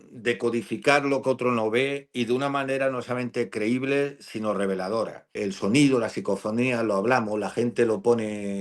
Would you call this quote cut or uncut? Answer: cut